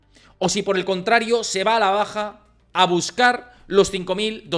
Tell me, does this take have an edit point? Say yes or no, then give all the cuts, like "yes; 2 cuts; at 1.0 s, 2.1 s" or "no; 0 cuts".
no; 0 cuts